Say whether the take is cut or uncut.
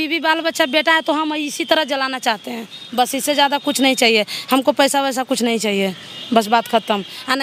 uncut